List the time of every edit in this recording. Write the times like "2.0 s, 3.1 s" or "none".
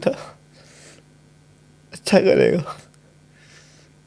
none